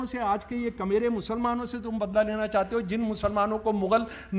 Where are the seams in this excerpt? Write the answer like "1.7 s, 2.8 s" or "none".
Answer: none